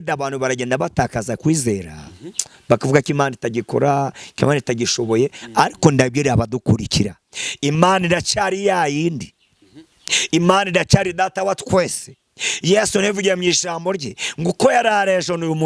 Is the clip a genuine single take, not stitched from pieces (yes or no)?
yes